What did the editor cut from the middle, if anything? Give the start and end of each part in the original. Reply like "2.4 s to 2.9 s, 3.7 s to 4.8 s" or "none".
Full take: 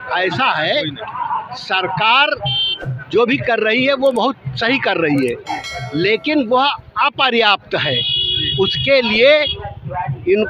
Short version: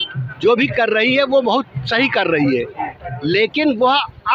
none